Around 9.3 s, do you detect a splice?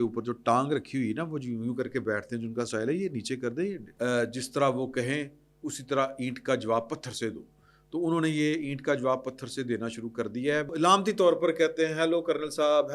no; 2 cuts; at 3.8 s, 10.7 s

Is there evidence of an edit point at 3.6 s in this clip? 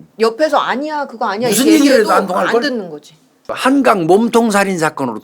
yes; 1 cut; at 3.6 s

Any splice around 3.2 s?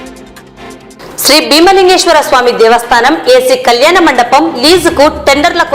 no; 1 cut; at 0.9 s

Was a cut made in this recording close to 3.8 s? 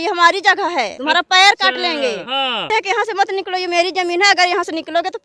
no; 2 cuts; at 0.9 s, 2.6 s

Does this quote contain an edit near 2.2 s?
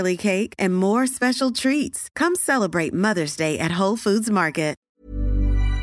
no; 1 cut; at 4.8 s

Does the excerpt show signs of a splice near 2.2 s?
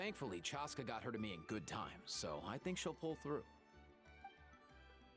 no; 1 cut; at 3.5 s

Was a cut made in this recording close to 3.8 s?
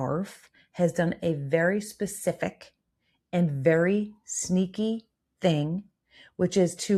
no; 0 cuts

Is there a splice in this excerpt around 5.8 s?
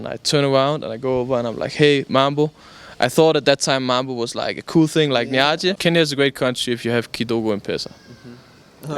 yes; 1 cut; at 5.8 s

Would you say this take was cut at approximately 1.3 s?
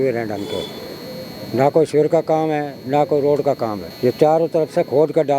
no; 1 cut; at 3.9 s

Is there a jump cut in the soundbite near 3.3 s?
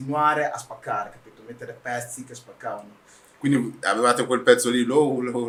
no; 0 cuts

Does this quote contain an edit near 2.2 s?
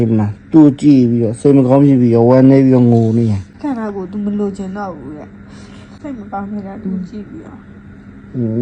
no; 2 cuts; at 3.6 s, 5.9 s

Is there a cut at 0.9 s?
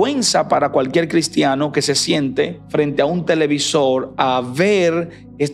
no; 1 cut; at 2.6 s

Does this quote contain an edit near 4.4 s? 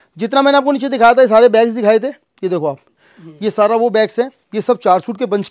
no; 0 cuts

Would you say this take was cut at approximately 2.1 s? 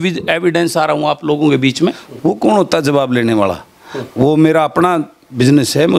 yes; 1 cut; at 2.1 s

